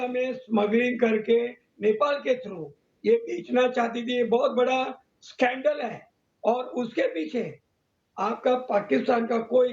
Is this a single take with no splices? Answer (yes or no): yes